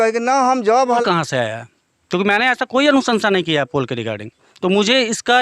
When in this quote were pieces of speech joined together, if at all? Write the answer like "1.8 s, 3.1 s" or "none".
1.0 s